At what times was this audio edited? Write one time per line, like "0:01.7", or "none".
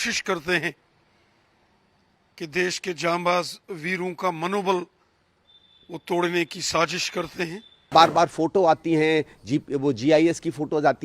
0:07.9